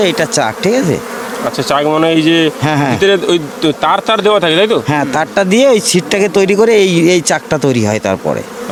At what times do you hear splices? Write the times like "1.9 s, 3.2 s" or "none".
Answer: none